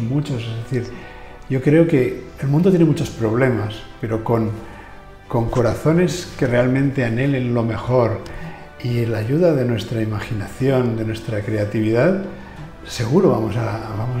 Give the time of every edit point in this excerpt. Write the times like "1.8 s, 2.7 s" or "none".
none